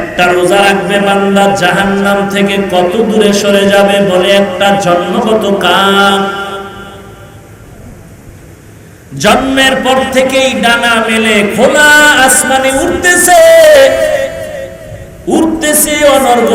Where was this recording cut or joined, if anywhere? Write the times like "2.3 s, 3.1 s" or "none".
none